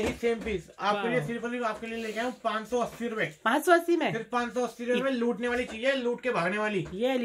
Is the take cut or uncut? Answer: uncut